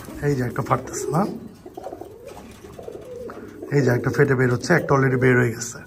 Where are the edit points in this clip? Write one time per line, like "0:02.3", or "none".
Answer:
none